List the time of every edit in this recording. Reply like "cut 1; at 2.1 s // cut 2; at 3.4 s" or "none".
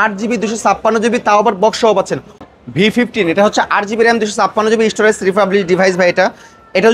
cut 1; at 2.3 s